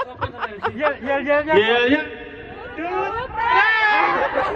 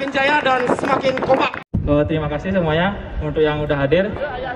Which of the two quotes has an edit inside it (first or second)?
second